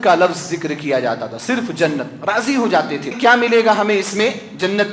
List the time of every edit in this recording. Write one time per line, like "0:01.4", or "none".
0:03.1